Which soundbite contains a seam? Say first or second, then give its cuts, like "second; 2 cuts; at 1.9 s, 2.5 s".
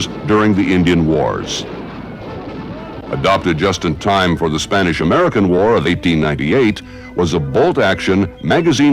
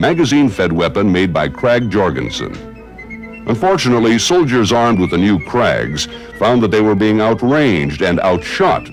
first; 1 cut; at 6.0 s